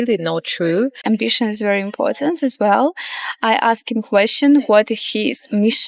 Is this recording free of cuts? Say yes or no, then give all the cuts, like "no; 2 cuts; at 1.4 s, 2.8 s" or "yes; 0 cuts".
no; 1 cut; at 1.0 s